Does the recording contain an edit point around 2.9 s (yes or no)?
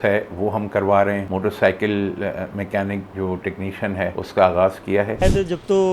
no